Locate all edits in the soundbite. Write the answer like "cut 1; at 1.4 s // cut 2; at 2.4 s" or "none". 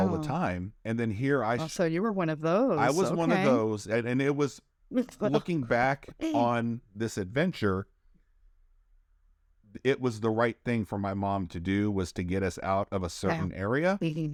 none